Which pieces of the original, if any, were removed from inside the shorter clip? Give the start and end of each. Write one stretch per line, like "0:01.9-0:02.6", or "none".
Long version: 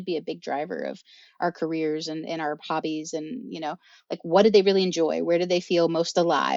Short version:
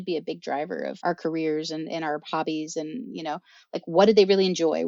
0:01.0-0:01.3